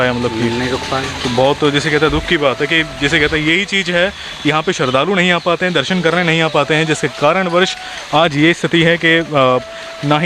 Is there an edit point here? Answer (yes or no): no